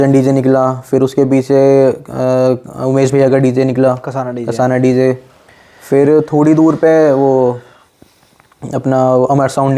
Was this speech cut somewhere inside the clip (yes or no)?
no